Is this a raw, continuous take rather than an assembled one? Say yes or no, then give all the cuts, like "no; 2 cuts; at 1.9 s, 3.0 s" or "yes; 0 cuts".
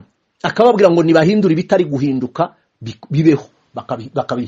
yes; 0 cuts